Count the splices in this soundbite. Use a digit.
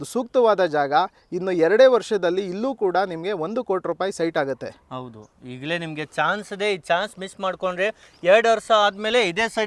0